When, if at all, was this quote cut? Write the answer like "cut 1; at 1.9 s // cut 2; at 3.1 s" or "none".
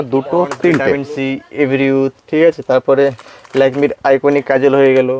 cut 1; at 1.1 s